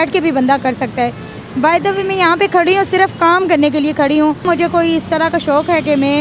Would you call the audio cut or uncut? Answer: cut